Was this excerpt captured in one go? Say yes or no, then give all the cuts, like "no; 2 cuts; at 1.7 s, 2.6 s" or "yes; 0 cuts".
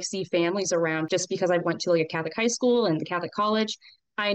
no; 1 cut; at 1.1 s